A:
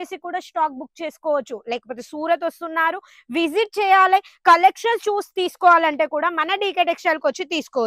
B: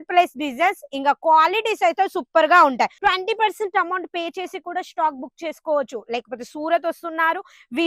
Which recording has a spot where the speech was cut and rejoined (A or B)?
B